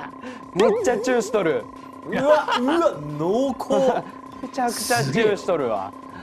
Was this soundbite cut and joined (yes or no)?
no